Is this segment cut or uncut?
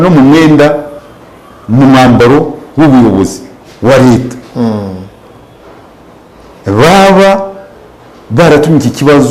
uncut